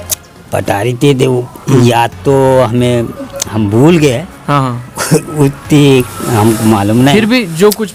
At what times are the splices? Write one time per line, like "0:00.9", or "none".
none